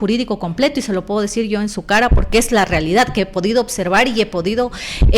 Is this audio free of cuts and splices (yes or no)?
yes